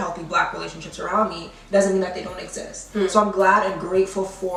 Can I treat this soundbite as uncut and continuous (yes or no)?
yes